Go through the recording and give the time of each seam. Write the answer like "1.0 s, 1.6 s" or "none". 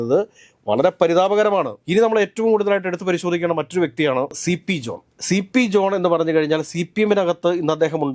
none